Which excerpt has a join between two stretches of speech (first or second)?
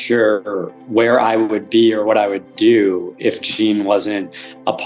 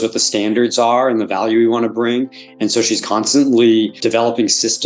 second